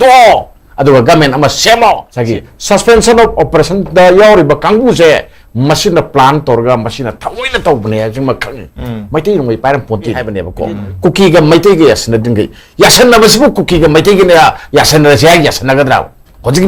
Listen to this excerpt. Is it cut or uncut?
cut